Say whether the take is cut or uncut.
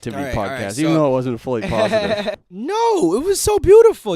cut